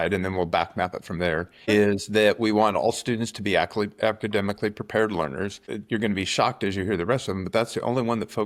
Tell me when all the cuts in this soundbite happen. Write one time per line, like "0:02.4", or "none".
none

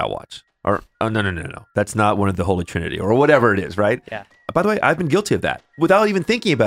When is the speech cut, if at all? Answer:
0:04.3
0:05.7

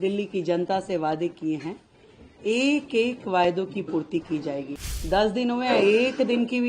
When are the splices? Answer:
0:04.7

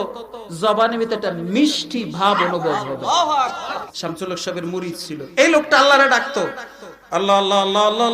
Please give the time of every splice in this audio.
0:03.9

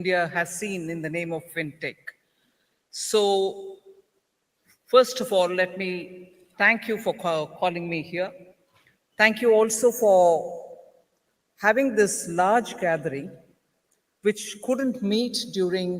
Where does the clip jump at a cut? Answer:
0:01.5
0:07.7

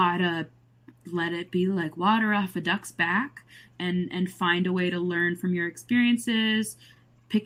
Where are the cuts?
none

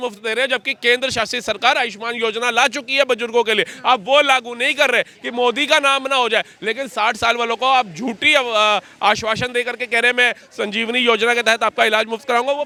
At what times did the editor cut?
none

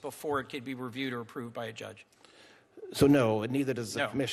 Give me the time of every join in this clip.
none

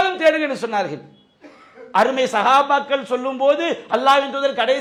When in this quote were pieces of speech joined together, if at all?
none

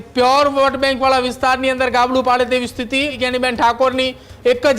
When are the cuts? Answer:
0:03.2

